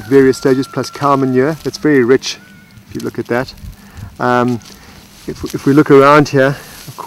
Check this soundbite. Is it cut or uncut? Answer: uncut